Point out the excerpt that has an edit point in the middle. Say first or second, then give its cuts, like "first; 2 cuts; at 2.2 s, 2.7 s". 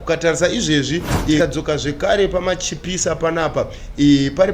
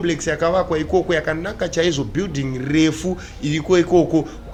first; 1 cut; at 1.4 s